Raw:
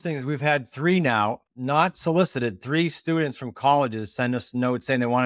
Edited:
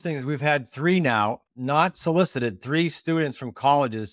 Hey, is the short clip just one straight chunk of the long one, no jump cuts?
yes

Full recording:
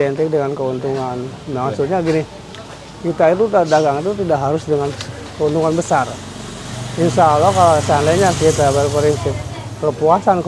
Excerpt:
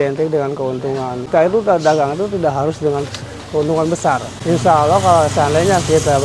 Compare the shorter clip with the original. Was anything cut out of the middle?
yes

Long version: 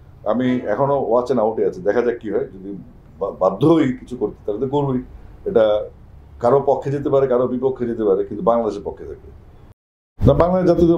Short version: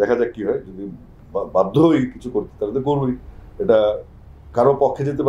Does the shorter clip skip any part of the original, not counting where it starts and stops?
no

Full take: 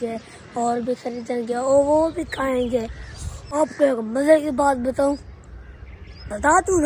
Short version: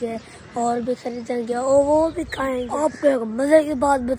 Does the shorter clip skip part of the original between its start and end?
yes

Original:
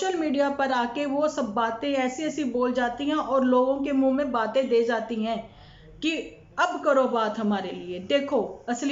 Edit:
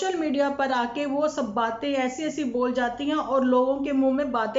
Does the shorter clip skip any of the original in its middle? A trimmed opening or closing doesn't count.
no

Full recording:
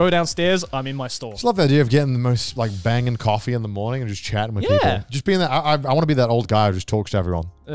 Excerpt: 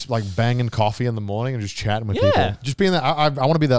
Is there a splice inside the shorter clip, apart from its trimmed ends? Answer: no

